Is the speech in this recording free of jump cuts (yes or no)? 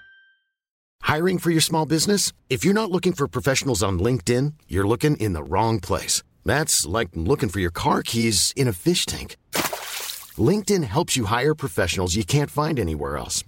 no